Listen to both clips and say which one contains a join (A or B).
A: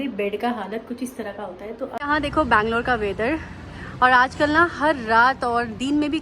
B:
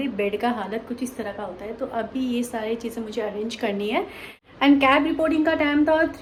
A